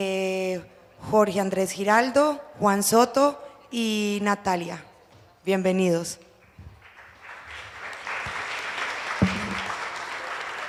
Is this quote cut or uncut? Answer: uncut